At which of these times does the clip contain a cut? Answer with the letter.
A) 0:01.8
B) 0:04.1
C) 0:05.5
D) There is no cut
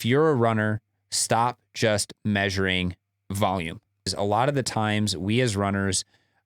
B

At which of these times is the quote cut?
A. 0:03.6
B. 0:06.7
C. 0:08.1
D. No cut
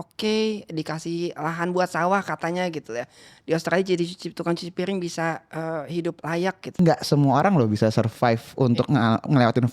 B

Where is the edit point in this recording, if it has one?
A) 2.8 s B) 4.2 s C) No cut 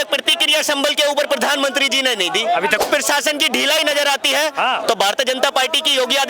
A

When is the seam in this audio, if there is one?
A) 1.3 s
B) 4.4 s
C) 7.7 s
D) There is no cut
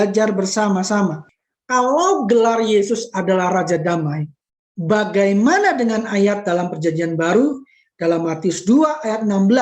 A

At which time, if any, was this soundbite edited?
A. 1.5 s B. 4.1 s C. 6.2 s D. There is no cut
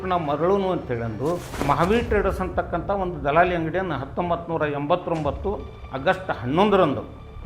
A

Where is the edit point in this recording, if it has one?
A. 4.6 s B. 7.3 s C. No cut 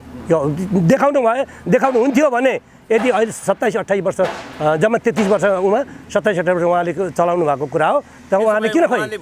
C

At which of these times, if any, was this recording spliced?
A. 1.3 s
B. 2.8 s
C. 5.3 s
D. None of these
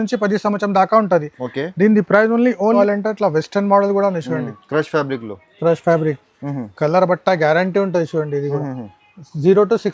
B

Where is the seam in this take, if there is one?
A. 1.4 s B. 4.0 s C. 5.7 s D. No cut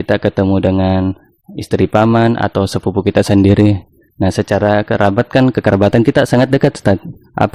D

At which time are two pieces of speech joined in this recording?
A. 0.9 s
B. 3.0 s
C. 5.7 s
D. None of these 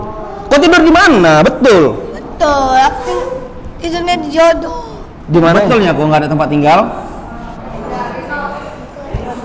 C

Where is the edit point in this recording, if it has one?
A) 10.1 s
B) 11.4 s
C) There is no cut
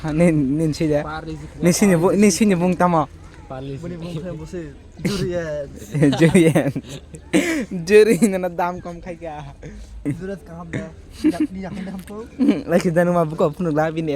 A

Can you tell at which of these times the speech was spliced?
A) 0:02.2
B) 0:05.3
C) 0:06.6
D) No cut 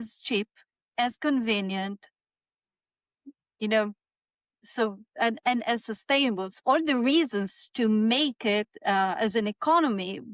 C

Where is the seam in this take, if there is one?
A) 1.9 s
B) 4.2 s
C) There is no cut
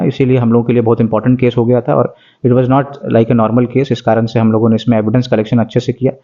C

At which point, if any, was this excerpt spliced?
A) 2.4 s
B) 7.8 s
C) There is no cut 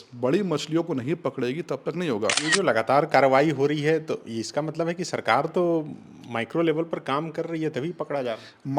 A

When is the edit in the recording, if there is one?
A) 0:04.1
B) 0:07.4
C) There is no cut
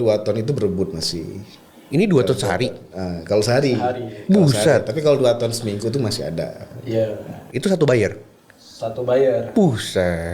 B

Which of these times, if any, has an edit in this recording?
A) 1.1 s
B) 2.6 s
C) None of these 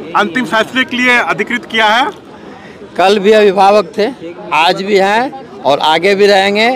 C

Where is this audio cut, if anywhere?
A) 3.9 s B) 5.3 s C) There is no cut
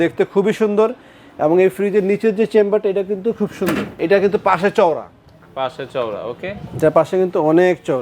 A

